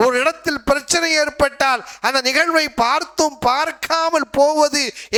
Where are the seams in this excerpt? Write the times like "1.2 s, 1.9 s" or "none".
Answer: none